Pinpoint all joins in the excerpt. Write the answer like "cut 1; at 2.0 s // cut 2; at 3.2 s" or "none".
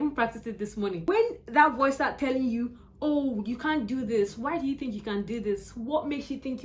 cut 1; at 1.0 s